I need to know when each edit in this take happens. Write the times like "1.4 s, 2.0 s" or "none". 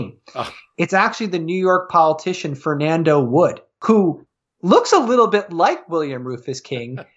3.7 s